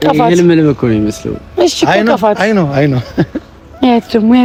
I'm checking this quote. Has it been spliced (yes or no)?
no